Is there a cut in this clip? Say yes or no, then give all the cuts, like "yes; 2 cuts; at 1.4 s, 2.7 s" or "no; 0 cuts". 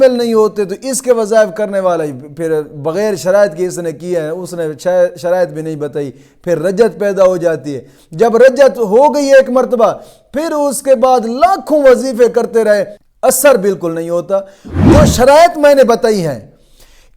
yes; 2 cuts; at 13.0 s, 14.8 s